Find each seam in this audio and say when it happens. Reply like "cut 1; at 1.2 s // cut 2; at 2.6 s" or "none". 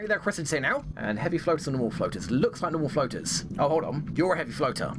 cut 1; at 3.5 s